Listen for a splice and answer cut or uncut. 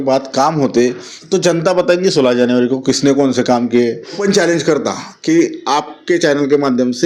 cut